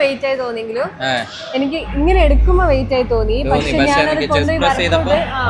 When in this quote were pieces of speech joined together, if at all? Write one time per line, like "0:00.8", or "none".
none